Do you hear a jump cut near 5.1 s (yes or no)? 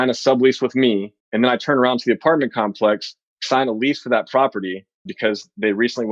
yes